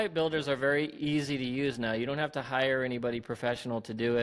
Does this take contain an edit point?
no; 0 cuts

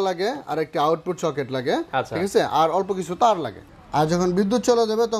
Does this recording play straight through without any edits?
no; 1 cut; at 3.7 s

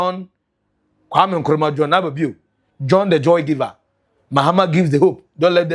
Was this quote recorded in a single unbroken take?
yes; 0 cuts

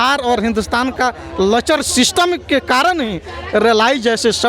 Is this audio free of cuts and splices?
yes; 0 cuts

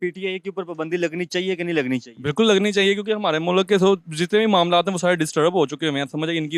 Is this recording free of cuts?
yes; 0 cuts

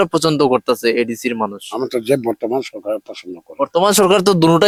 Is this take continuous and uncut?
yes; 0 cuts

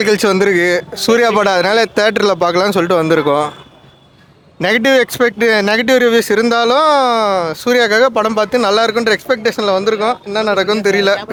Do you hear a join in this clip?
no; 0 cuts

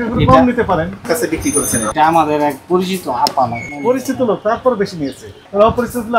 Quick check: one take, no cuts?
no; 1 cut; at 1.0 s

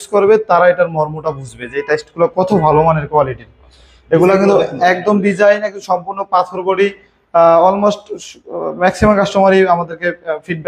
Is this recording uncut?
yes; 0 cuts

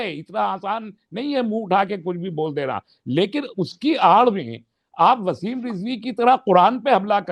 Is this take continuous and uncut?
yes; 0 cuts

